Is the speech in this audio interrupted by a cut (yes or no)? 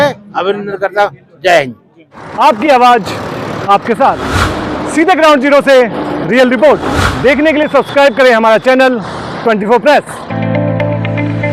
no